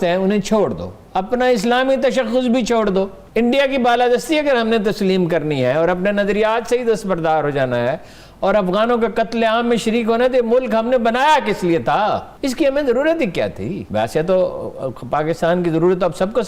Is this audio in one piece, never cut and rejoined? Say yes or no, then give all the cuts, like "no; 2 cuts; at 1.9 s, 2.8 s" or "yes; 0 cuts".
no; 3 cuts; at 3.2 s, 12.3 s, 13.8 s